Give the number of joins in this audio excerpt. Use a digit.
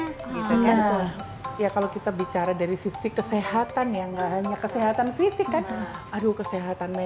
1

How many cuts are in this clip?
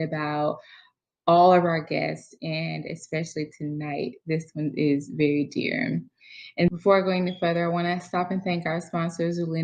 1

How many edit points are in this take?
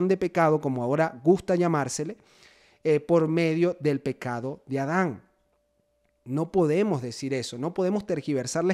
0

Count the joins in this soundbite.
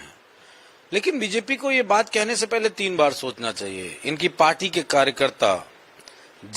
0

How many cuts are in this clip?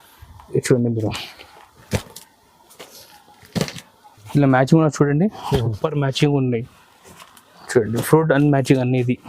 1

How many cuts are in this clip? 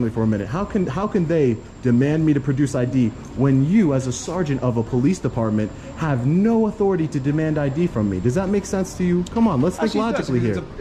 0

